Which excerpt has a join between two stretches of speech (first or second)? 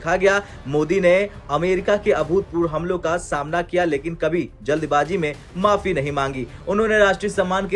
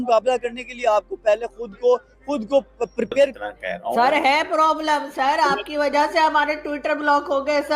second